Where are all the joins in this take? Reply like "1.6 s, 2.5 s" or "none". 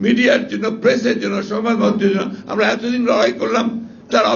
none